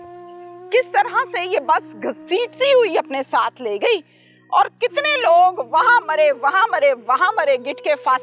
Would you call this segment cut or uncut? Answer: uncut